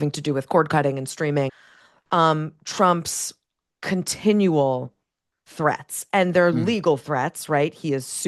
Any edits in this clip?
yes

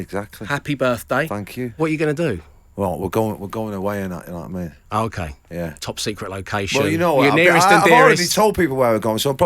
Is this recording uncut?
no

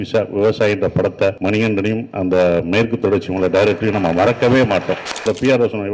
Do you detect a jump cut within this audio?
yes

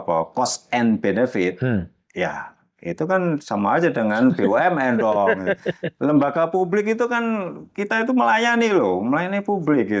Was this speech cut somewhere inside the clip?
no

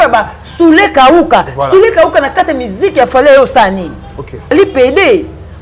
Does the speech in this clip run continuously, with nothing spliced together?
no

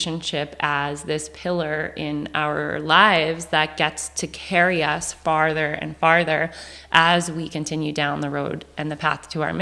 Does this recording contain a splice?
no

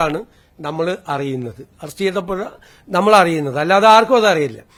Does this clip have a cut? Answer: no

